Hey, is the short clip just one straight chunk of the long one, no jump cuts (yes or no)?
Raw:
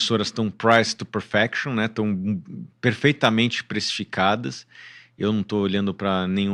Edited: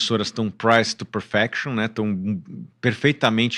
yes